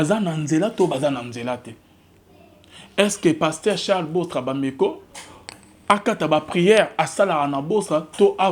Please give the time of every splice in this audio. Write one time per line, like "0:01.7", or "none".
none